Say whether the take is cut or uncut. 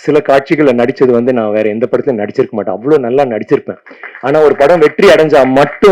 uncut